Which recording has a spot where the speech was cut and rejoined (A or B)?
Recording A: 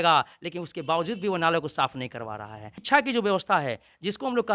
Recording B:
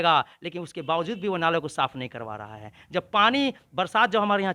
A